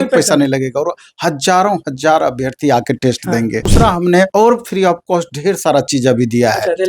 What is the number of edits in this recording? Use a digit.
1